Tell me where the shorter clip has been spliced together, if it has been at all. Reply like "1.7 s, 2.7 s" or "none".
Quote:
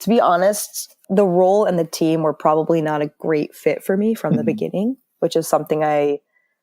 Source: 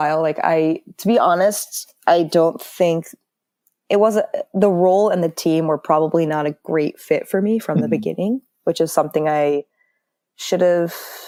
0.9 s

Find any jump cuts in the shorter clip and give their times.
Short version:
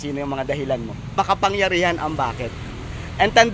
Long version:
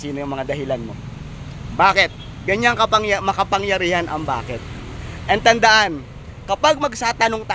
1.1 s

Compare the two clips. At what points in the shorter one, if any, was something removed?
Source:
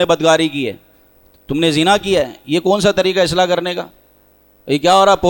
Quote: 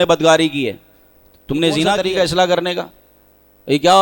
2.0 s

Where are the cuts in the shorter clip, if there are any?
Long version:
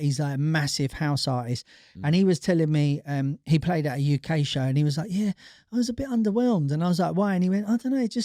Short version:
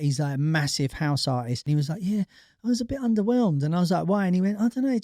1.6 s

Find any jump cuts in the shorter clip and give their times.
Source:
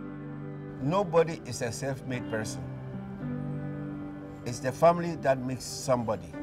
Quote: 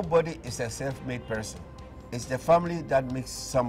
1.9 s

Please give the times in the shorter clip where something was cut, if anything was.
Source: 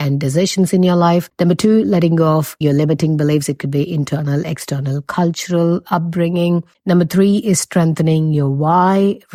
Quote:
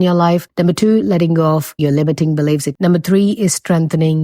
2.7 s

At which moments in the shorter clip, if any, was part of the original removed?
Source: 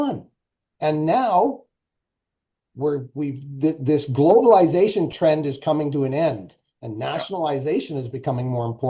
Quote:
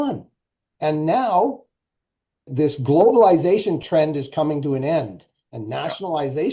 2.5 s

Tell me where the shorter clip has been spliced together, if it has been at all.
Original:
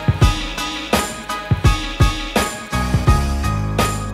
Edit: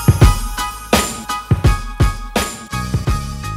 none

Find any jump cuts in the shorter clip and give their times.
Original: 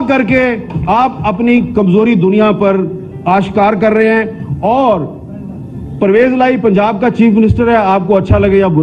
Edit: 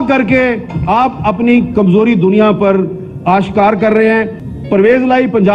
4.4 s

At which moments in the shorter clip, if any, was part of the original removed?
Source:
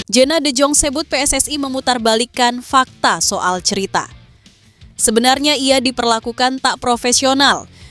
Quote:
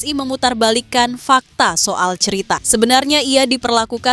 2.6 s

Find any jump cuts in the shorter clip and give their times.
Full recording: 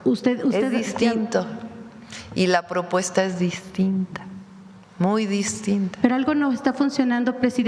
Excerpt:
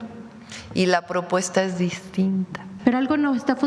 2.7 s

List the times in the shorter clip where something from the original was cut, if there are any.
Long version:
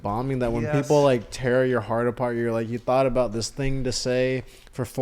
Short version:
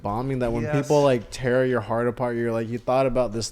none

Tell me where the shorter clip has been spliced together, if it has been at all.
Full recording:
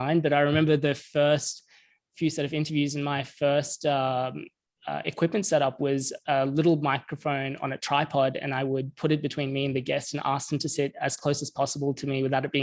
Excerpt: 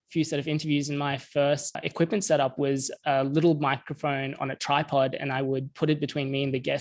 1.7 s

